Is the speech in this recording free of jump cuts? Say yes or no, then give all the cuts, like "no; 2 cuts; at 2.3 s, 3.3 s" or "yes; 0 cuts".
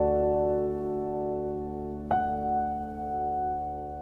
no; 1 cut; at 0.9 s